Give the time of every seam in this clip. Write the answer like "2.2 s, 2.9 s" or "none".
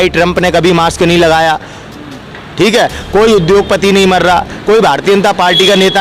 none